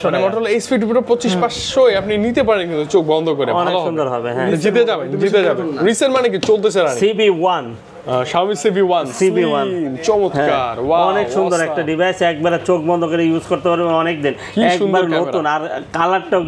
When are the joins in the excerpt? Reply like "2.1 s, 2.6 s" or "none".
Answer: none